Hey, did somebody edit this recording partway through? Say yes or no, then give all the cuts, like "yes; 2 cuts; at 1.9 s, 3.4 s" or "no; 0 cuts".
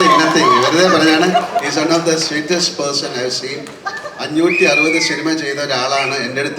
no; 0 cuts